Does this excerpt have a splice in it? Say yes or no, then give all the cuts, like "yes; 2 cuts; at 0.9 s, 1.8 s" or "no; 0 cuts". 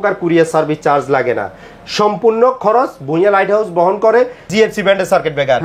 yes; 1 cut; at 4.5 s